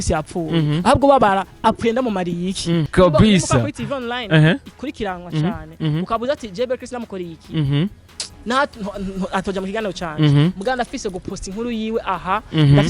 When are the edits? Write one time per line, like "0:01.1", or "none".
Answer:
0:02.9